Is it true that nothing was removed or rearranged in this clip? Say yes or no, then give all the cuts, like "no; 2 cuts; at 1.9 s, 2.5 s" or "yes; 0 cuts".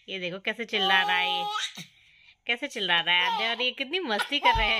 yes; 0 cuts